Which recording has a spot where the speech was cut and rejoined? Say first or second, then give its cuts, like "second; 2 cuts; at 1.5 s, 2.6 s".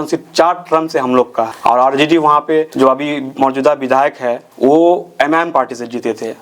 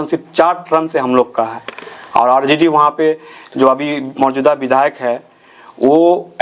first; 3 cuts; at 1.5 s, 2.7 s, 4.4 s